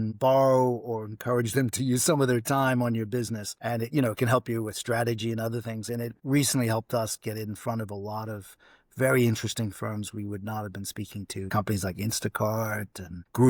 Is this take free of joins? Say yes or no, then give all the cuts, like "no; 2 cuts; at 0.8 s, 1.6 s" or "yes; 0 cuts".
yes; 0 cuts